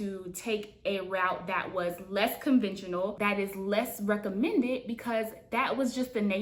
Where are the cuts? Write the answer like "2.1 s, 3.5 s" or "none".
none